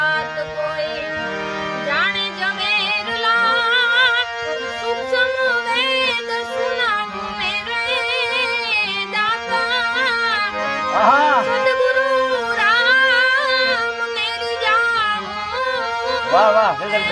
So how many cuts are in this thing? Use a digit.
0